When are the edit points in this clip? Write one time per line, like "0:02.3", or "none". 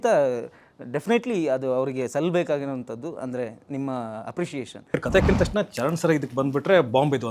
0:04.9